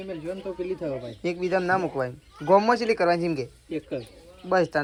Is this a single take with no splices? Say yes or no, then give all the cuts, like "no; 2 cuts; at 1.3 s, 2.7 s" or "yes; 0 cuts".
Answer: yes; 0 cuts